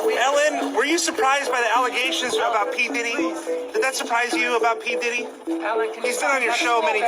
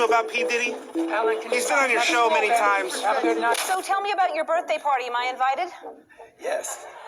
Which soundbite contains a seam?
second; 1 cut; at 3.5 s

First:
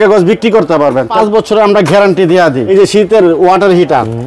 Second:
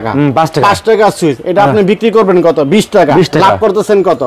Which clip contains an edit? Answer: first; 2 cuts; at 1.1 s, 2.6 s

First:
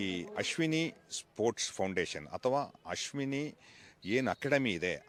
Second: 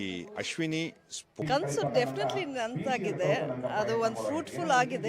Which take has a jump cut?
second; 1 cut; at 1.2 s

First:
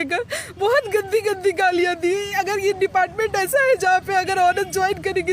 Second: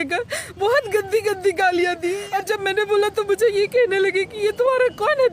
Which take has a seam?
second; 1 cut; at 2.2 s

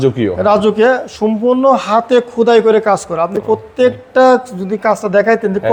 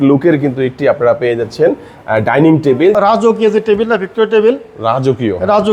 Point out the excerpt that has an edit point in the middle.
second; 1 cut; at 2.9 s

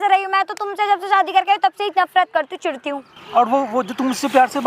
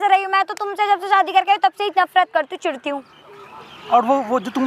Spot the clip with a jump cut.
first; 1 cut; at 3.1 s

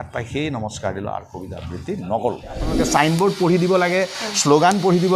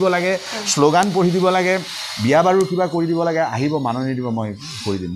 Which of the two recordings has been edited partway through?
first; 1 cut; at 2.7 s

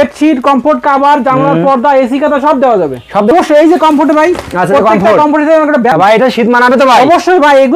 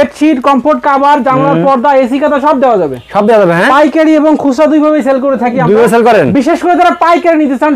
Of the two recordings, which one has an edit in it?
first; 2 cuts; at 3.3 s, 5.9 s

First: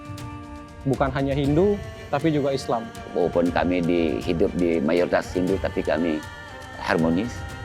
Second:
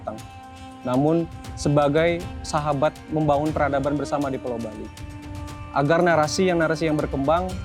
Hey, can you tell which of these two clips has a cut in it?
first; 1 cut; at 3.1 s

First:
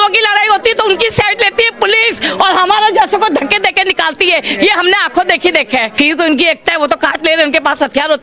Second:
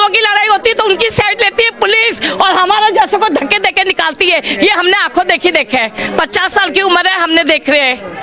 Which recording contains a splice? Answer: first; 1 cut; at 5.9 s

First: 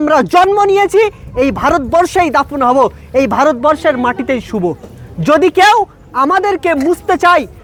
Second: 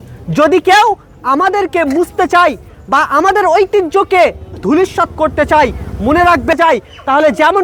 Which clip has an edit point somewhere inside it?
second; 1 cut; at 6.5 s

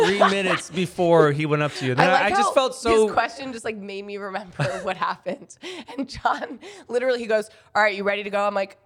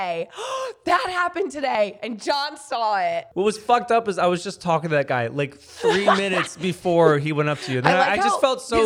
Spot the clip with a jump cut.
second; 1 cut; at 3.3 s

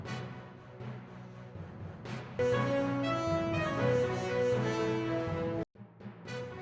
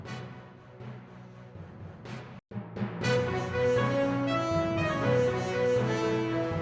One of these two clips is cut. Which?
first; 1 cut; at 2.4 s

